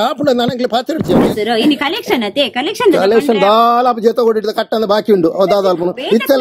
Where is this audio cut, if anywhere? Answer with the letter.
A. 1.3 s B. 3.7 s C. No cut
A